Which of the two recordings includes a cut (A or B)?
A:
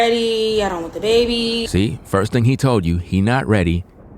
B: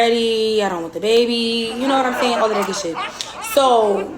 B